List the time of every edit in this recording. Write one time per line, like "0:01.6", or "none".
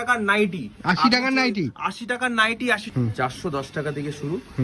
0:02.9